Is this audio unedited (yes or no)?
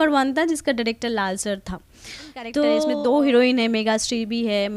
no